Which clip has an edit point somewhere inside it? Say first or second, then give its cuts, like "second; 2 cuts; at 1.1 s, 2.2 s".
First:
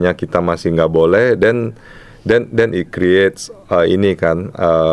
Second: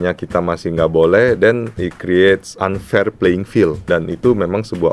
second; 3 cuts; at 1.9 s, 2.5 s, 3.8 s